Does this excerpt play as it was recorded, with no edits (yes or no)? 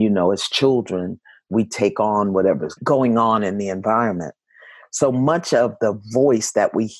no